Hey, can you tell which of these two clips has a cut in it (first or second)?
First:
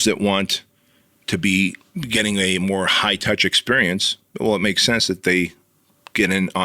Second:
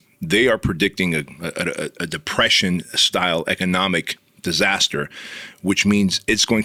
first